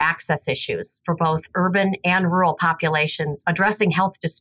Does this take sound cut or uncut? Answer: cut